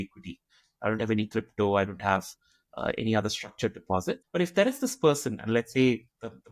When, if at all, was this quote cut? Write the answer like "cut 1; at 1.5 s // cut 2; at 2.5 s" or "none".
cut 1; at 4.2 s